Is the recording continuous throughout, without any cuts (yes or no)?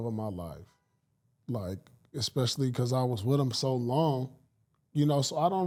yes